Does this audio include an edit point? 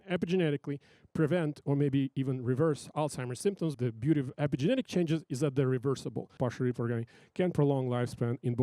yes; 2 cuts; at 3.8 s, 6.3 s

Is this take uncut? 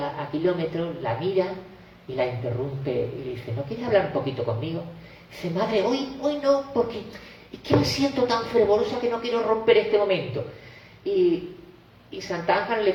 yes; 0 cuts

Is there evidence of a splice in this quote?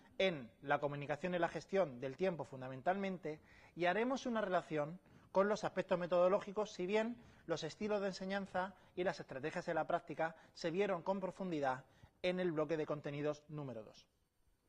yes; 1 cut; at 5.6 s

